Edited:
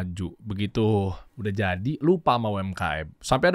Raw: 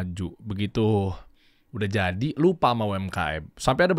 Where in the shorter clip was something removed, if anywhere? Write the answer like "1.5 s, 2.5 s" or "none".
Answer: 1.3 s